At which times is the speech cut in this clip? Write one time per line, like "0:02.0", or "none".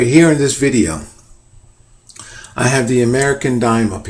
0:03.0